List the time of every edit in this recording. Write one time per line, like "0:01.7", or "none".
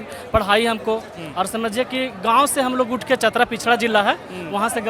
none